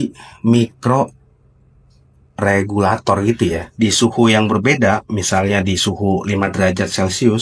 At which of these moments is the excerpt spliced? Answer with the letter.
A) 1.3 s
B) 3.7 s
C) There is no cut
B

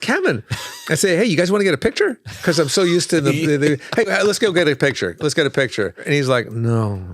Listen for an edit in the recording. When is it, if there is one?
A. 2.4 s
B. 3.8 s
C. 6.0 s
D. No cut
C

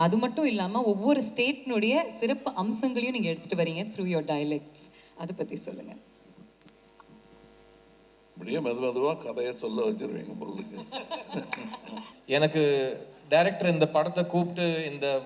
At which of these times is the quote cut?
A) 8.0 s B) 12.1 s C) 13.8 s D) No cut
B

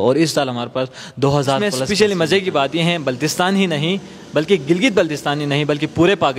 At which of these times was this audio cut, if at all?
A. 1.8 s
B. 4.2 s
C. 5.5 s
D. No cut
A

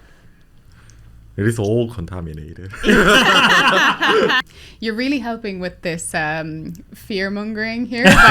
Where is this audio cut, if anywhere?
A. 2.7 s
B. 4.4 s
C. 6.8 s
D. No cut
B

